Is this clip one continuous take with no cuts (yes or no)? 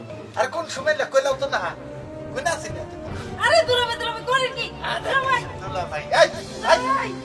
no